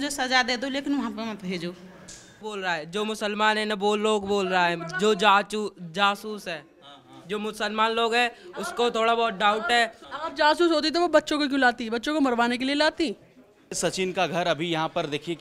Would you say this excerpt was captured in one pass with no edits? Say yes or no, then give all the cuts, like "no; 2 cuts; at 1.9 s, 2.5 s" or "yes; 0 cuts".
no; 3 cuts; at 2.4 s, 10.0 s, 13.8 s